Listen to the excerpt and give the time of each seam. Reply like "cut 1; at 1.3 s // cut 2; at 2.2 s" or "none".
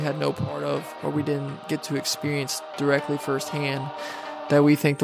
cut 1; at 0.9 s